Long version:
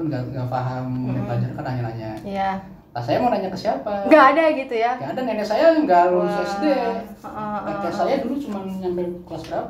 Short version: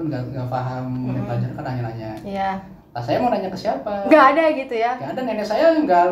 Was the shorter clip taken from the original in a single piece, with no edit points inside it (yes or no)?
yes